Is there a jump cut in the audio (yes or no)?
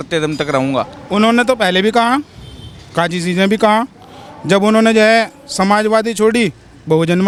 no